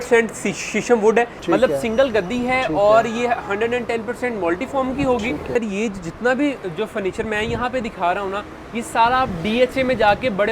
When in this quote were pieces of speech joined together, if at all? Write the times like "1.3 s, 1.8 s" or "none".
1.4 s, 5.5 s